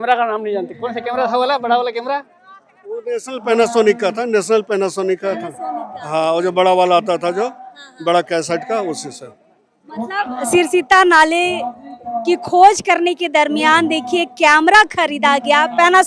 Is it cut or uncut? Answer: uncut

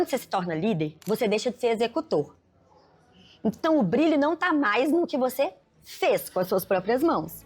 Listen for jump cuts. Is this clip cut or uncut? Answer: cut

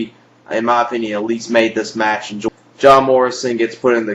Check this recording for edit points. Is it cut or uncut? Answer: uncut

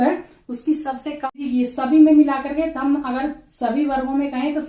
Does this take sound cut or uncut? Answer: cut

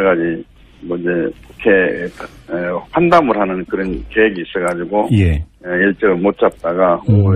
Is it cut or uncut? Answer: uncut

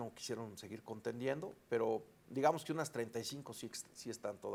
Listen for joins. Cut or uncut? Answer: uncut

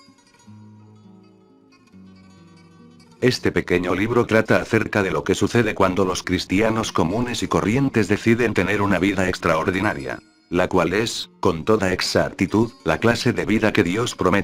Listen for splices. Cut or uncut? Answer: uncut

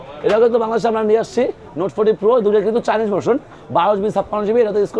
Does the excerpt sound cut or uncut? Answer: uncut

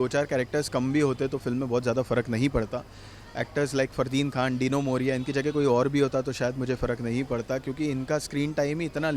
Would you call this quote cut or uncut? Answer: uncut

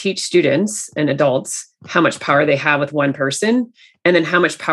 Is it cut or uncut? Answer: uncut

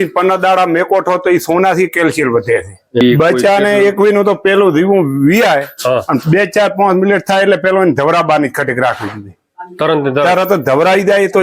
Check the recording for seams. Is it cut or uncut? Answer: cut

